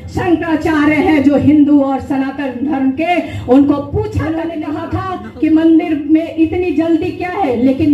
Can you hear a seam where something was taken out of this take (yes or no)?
yes